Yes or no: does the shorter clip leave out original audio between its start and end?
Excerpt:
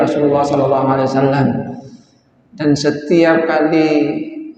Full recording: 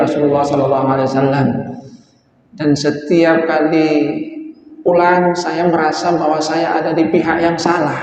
no